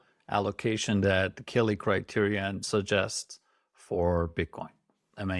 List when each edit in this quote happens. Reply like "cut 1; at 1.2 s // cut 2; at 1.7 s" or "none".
cut 1; at 2.6 s